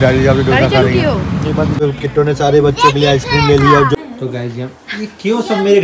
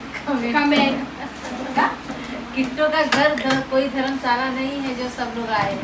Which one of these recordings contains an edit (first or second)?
first